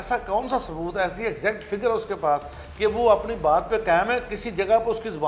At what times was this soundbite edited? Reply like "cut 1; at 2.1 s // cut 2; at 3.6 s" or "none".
none